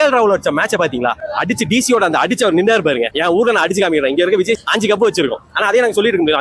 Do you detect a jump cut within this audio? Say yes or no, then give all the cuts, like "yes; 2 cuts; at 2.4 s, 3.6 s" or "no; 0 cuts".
yes; 1 cut; at 4.6 s